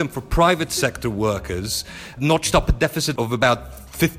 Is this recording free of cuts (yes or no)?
no